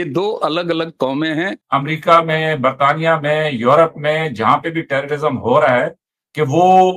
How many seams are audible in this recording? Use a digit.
1